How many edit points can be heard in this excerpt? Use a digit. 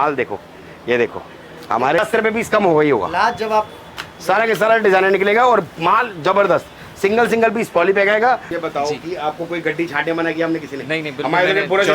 2